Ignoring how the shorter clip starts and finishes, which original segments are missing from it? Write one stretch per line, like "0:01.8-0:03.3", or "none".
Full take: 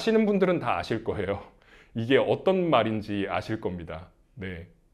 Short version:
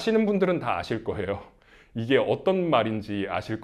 none